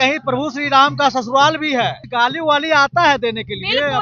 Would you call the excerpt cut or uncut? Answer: cut